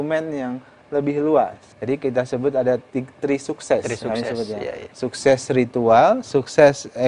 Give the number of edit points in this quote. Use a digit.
1